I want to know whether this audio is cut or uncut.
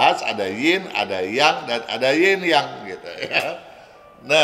uncut